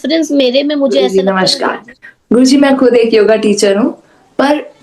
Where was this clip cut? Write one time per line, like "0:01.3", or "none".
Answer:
0:01.0